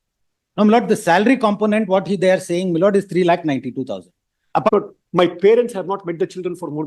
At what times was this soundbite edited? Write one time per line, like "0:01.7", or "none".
0:04.7